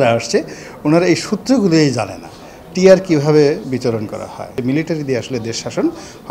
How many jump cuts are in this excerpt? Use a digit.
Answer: 1